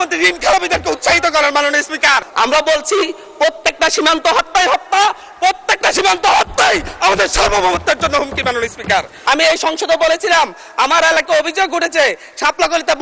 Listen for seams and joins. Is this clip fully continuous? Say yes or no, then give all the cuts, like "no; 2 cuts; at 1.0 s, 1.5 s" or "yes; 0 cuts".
no; 2 cuts; at 2.3 s, 9.1 s